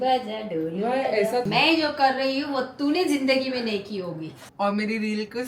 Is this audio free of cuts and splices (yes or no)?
no